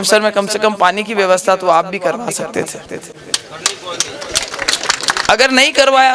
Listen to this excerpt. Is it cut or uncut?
uncut